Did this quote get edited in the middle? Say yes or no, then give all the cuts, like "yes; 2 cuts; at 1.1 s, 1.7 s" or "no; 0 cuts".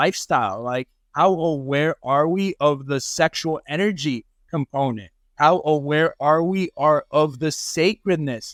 no; 0 cuts